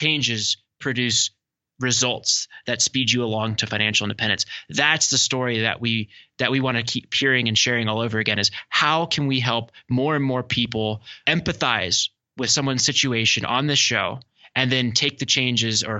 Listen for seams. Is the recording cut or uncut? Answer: cut